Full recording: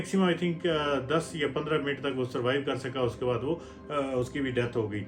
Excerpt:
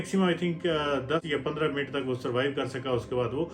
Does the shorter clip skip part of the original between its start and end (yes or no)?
yes